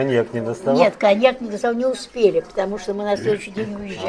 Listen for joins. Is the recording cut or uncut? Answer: uncut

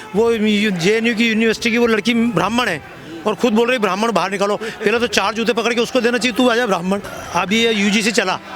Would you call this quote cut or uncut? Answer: cut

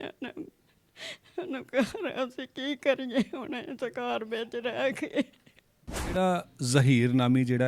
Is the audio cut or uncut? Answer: cut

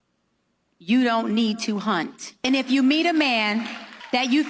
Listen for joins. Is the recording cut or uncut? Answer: uncut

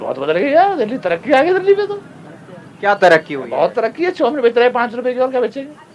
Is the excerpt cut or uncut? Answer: uncut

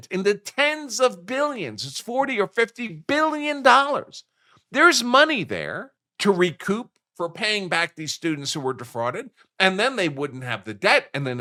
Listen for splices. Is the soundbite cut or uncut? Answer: uncut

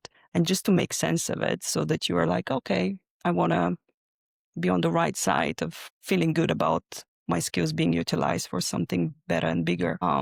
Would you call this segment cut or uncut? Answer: uncut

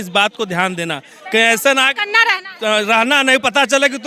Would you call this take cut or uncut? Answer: uncut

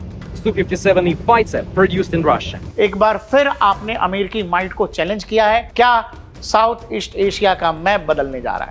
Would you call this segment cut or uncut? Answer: cut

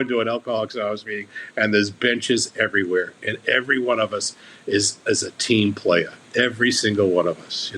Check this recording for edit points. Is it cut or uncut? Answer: cut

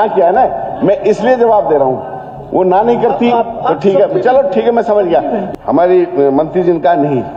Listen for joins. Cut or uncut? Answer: cut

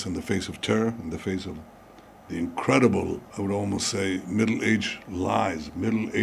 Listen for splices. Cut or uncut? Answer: cut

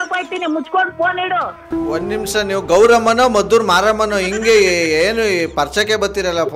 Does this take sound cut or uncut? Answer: cut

